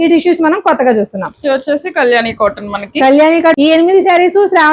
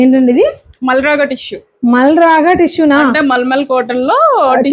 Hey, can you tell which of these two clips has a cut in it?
first; 1 cut; at 3.6 s

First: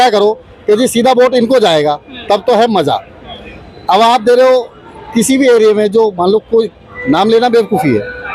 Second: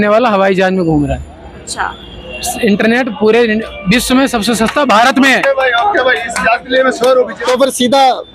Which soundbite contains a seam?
second; 1 cut; at 7.4 s

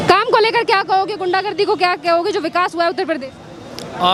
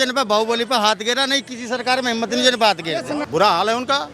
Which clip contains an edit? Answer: second; 1 cut; at 3.2 s

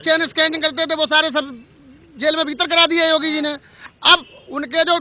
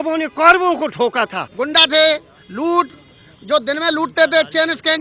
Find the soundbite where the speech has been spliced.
second; 1 cut; at 1.5 s

